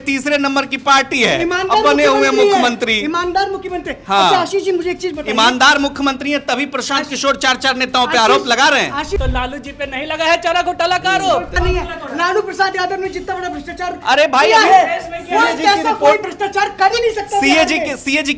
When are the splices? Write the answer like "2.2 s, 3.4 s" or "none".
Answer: 9.2 s, 11.5 s